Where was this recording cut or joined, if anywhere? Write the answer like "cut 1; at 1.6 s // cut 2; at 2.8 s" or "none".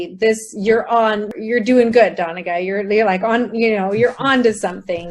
cut 1; at 1.3 s

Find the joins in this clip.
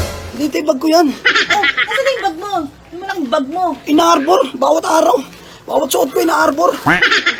none

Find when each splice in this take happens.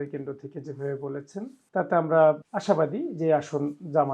cut 1; at 1.6 s // cut 2; at 2.5 s

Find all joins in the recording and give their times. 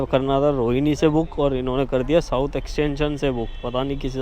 none

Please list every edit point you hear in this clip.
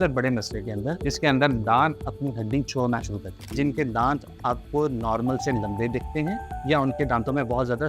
cut 1; at 3.5 s

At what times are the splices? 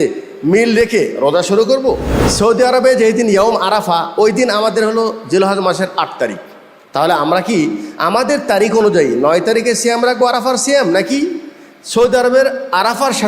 cut 1; at 2.1 s

